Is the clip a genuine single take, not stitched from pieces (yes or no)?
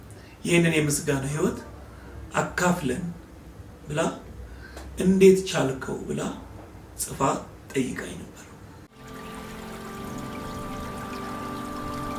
no